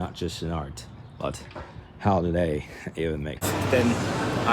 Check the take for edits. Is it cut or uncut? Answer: cut